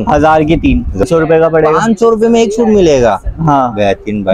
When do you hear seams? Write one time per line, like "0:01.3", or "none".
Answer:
0:01.1